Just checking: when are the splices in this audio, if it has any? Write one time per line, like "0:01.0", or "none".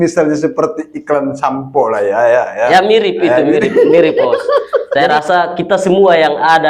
0:04.9